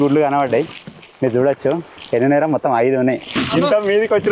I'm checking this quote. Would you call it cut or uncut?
cut